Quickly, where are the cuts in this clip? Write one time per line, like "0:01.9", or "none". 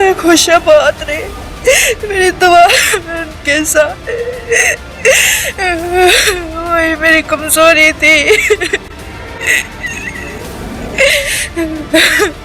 none